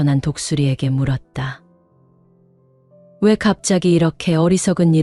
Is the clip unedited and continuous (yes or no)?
yes